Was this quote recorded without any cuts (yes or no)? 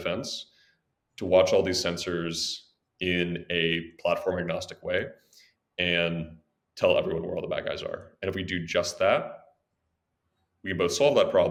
yes